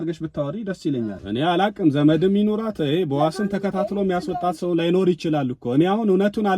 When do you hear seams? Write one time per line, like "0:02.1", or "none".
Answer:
0:01.2